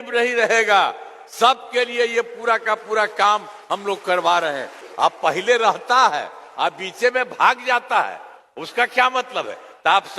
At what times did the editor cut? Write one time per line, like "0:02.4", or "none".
0:04.9